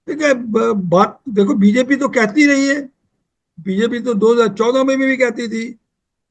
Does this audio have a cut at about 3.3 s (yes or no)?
no